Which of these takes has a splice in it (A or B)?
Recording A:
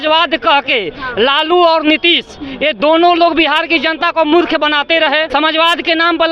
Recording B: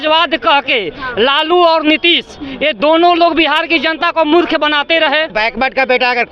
B